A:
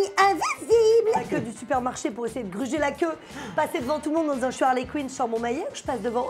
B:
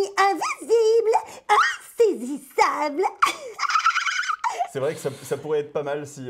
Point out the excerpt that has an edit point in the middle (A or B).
A